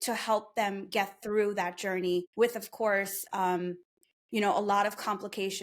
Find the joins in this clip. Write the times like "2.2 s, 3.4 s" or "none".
2.3 s